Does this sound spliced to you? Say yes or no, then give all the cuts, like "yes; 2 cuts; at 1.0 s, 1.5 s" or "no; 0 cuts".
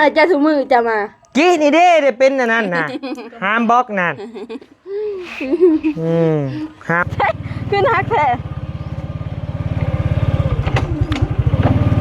yes; 1 cut; at 7.0 s